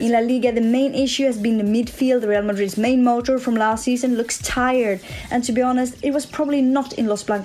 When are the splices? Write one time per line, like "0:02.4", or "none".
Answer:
none